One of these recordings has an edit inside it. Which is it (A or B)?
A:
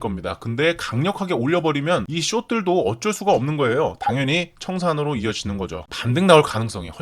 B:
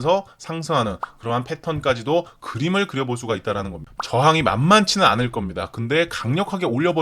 B